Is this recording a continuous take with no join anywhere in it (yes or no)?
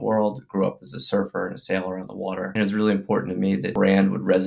no